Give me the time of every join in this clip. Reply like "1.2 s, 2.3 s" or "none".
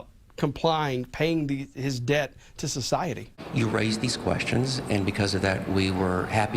3.3 s